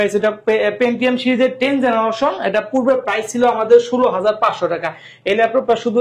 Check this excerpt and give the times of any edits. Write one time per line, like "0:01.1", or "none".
none

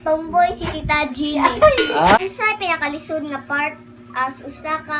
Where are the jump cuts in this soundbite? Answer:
0:02.2

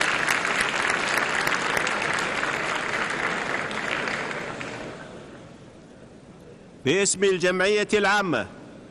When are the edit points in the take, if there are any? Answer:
0:05.6

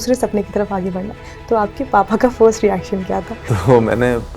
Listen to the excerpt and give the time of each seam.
0:03.4

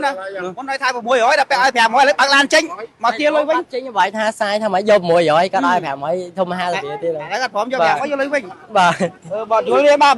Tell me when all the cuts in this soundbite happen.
none

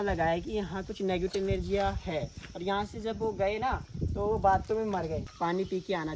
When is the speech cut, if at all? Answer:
0:05.2

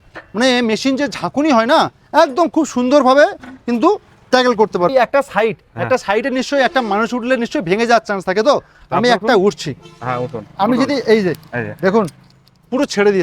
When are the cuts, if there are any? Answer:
0:04.9

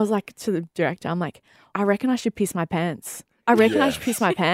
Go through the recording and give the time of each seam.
0:01.7

